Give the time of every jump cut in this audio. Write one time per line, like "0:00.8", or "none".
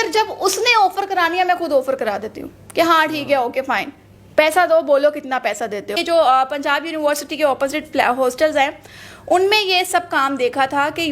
0:06.0